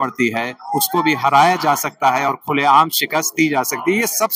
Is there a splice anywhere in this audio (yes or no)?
no